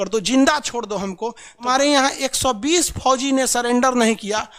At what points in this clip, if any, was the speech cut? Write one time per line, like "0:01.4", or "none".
0:01.7

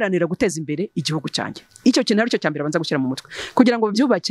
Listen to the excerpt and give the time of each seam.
none

